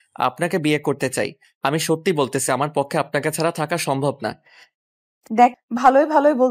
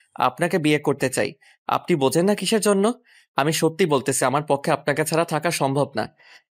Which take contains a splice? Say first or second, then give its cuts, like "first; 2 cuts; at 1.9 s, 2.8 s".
first; 2 cuts; at 1.4 s, 5.6 s